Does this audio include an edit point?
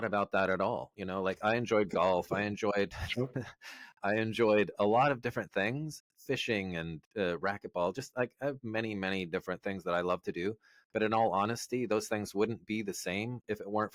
no; 0 cuts

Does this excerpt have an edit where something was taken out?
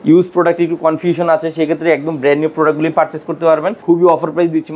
yes; 1 cut; at 3.7 s

